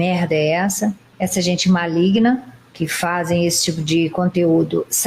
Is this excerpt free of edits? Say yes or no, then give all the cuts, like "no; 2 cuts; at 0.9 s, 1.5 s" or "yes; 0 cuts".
yes; 0 cuts